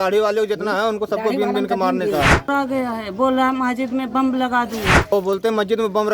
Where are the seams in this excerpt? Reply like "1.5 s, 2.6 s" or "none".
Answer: 2.5 s, 5.1 s